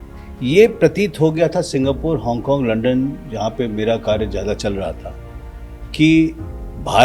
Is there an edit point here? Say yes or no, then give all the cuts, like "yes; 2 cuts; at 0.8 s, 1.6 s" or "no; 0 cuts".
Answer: no; 0 cuts